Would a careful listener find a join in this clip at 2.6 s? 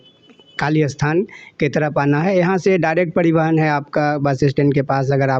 no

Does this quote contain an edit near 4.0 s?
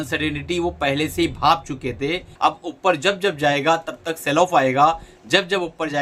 no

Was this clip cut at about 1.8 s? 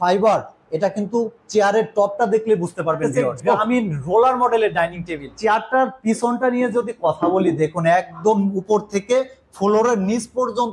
no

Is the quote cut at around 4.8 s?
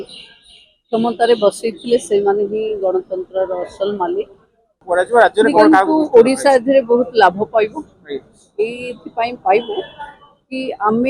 yes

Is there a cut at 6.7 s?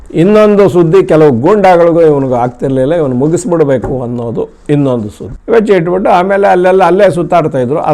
no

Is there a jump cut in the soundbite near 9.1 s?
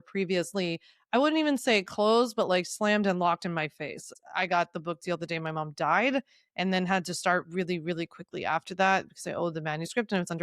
no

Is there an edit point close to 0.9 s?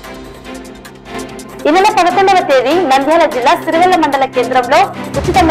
yes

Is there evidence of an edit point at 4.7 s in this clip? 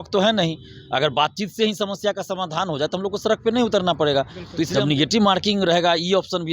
yes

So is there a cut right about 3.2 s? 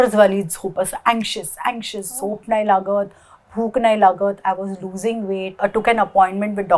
no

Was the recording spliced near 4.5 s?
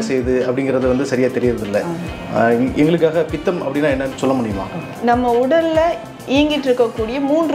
yes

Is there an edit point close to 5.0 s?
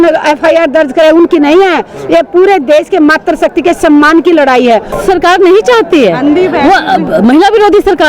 yes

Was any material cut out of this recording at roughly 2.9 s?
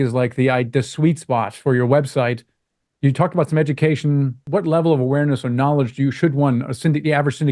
no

